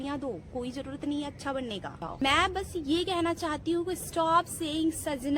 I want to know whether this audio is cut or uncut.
cut